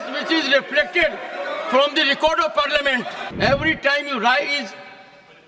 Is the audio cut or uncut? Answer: cut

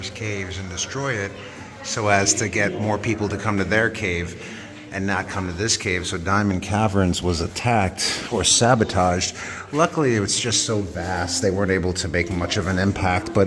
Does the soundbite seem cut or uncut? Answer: uncut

